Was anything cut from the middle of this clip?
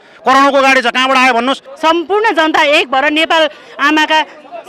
yes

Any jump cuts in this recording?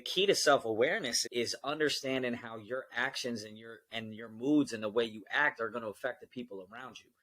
yes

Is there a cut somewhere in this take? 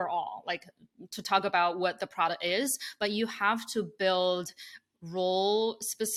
no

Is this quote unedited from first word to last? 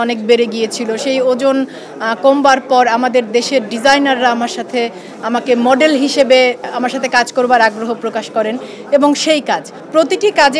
yes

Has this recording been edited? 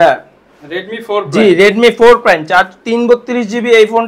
no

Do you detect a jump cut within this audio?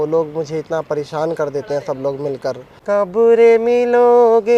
yes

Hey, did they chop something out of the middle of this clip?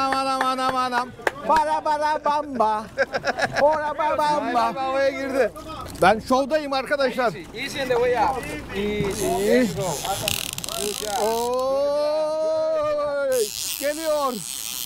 no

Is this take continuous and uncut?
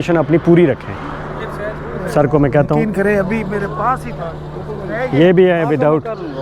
yes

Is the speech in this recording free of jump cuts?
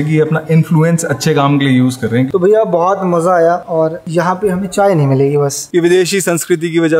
no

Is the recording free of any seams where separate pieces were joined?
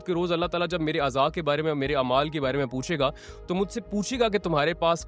yes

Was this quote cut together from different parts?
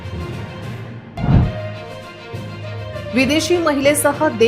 yes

